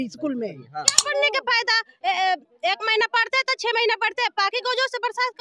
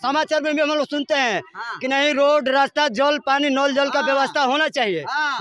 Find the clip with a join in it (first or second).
first